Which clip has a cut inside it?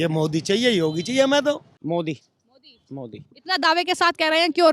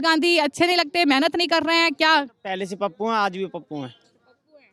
first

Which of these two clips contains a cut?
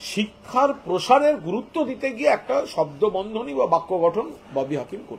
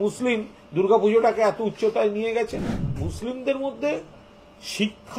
second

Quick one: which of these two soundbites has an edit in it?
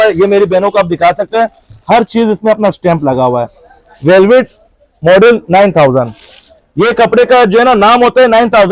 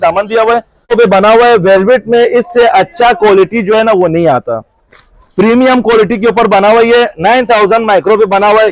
second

